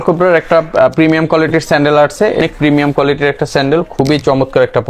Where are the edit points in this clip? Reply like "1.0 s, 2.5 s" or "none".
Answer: 2.4 s